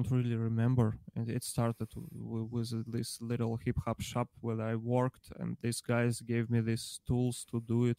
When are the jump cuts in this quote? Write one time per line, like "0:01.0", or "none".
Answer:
none

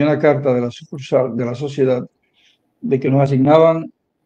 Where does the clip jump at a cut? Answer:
none

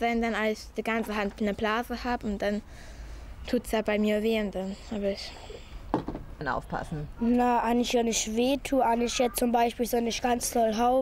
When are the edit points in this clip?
none

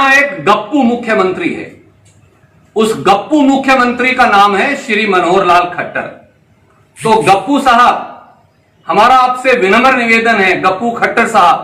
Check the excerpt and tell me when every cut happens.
none

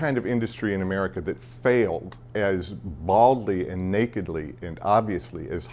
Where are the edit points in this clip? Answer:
none

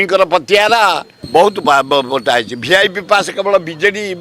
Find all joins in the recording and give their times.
0:01.1

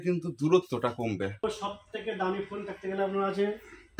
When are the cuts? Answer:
0:01.3

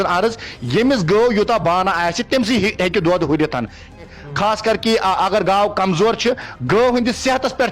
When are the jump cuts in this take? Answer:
0:04.0

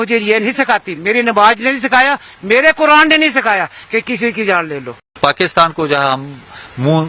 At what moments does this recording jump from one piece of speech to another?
0:05.2

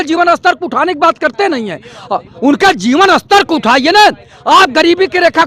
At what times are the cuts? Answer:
none

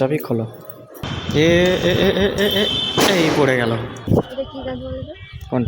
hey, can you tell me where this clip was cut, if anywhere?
0:00.9
0:04.1

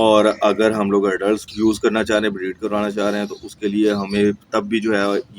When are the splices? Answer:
0:01.5

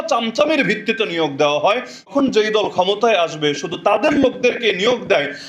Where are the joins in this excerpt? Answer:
0:02.1

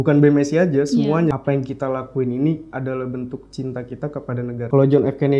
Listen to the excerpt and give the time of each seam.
0:01.3
0:04.6

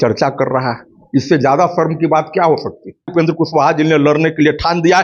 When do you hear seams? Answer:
0:03.1

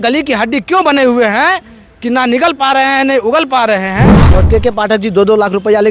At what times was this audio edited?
0:04.2

